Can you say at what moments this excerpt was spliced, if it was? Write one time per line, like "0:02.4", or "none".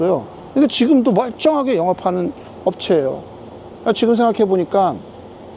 none